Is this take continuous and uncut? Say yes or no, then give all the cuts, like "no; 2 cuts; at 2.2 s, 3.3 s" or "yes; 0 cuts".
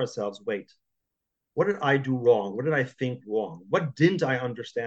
yes; 0 cuts